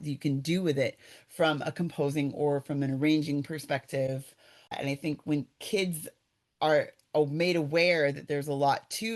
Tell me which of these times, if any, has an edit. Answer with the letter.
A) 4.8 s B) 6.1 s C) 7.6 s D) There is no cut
A